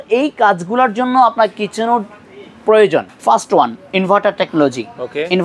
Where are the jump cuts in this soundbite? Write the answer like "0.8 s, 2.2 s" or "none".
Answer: 3.1 s